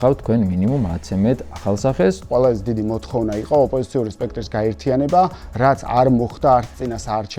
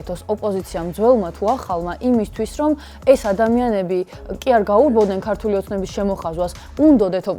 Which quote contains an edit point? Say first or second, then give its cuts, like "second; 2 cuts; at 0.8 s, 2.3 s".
first; 1 cut; at 2.3 s